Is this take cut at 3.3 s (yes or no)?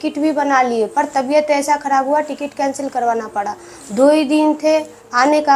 no